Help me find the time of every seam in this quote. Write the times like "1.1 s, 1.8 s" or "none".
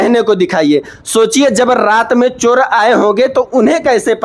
none